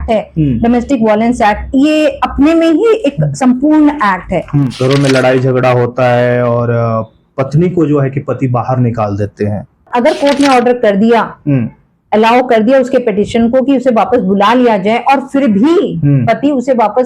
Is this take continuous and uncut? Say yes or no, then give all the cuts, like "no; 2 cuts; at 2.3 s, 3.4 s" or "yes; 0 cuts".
no; 2 cuts; at 4.7 s, 9.9 s